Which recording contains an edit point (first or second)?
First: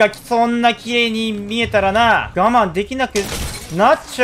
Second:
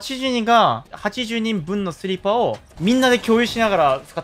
first